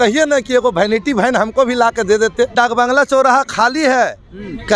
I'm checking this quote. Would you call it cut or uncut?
cut